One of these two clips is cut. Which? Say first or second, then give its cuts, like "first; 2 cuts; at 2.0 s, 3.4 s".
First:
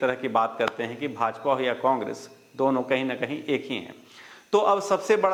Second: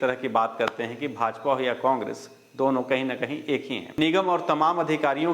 second; 1 cut; at 3.9 s